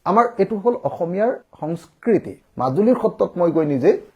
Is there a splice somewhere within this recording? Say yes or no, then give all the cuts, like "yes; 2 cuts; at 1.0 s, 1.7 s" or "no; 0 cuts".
yes; 1 cut; at 2.4 s